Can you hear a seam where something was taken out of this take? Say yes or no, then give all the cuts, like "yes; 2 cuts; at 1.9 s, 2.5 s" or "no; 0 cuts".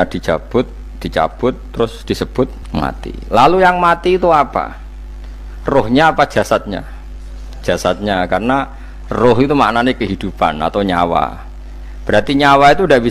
no; 0 cuts